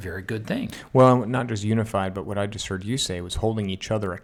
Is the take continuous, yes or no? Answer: yes